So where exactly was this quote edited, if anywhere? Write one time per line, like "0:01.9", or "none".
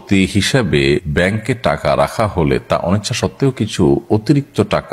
0:01.1